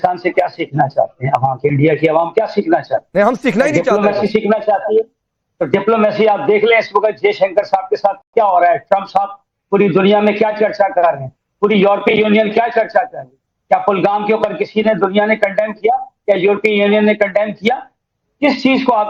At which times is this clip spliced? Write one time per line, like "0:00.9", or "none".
none